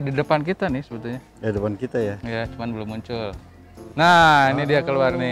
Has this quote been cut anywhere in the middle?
no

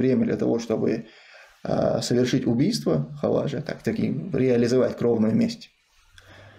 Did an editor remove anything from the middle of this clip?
no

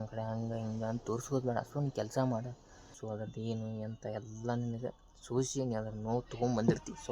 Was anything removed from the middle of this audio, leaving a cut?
yes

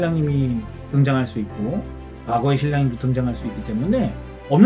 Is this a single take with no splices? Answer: yes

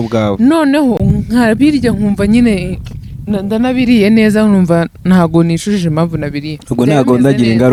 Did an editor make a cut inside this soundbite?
no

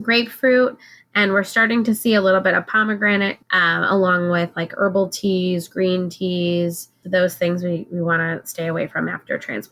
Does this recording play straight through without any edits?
no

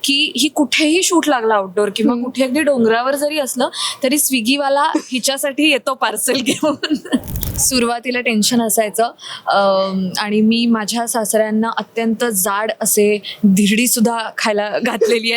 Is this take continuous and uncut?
no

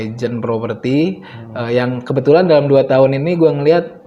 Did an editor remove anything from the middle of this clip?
no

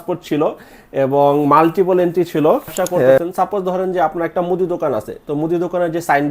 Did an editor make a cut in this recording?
yes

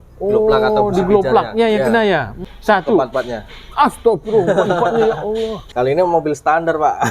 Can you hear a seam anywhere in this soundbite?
yes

